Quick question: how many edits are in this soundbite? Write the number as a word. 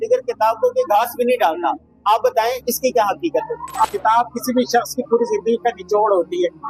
two